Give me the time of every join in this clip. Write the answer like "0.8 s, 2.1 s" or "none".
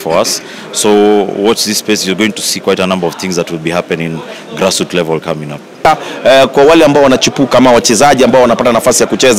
5.9 s